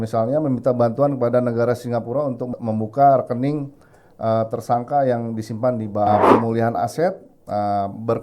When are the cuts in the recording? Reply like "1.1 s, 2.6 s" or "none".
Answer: 2.5 s, 6.1 s